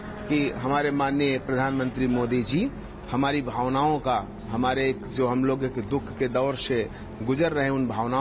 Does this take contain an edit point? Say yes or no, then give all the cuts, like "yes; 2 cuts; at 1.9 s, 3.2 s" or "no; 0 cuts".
no; 0 cuts